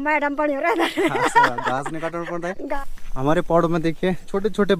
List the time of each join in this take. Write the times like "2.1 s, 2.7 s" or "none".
2.8 s